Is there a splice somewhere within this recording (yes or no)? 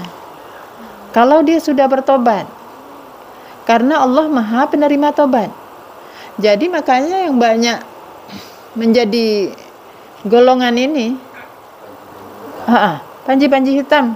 no